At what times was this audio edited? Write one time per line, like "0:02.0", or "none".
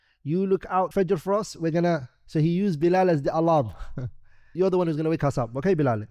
0:00.9
0:04.5